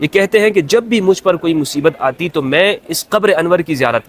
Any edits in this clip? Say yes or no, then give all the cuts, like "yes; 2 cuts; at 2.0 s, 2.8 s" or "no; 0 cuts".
no; 0 cuts